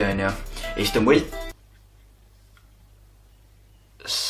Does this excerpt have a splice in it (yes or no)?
no